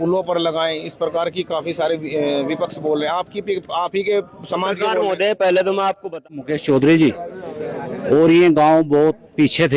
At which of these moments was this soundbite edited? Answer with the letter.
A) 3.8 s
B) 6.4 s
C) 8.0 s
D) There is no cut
B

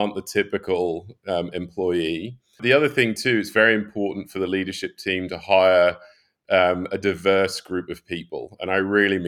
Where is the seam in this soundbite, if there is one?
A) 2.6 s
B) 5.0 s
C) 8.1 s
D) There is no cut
A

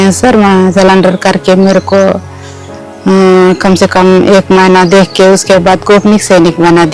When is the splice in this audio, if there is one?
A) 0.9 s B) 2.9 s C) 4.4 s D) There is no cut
D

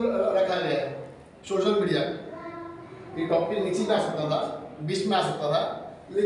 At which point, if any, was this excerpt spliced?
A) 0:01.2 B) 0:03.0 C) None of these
C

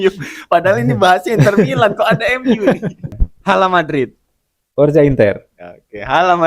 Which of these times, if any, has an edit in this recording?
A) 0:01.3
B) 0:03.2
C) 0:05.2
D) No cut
B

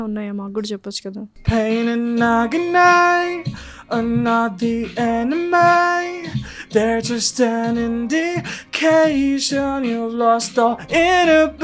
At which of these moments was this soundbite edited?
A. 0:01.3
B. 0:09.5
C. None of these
A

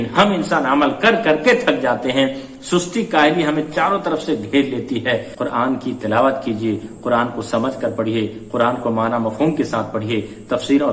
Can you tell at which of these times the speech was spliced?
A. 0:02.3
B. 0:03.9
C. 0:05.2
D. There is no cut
C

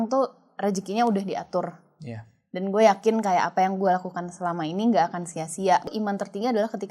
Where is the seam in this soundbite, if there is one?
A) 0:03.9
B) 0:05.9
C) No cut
B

